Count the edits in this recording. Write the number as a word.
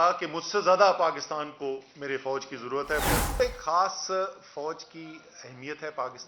one